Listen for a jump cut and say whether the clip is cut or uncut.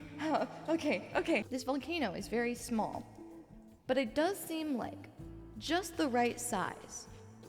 cut